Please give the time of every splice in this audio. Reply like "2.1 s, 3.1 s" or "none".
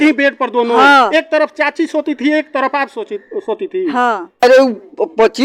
4.4 s